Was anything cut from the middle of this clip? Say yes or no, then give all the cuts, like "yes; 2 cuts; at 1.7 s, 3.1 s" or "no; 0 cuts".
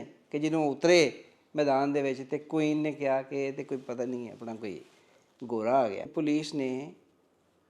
yes; 1 cut; at 6.1 s